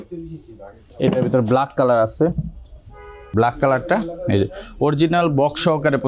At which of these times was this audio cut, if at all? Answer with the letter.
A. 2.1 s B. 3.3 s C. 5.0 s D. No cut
B